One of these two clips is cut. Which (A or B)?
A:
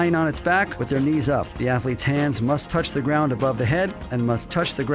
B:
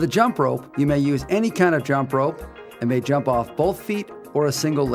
A